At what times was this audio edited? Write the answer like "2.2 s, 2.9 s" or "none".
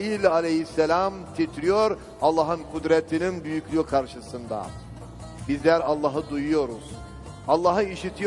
4.3 s